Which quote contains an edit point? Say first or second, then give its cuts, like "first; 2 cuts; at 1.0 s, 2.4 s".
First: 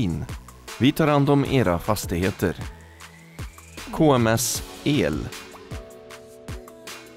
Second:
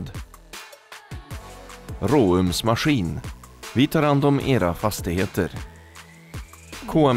first; 1 cut; at 5.3 s